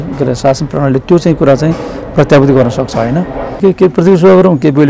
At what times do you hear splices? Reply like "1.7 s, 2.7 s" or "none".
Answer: 3.6 s